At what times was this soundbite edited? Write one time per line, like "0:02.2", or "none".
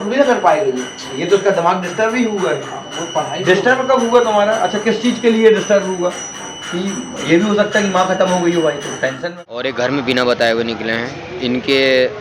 0:09.2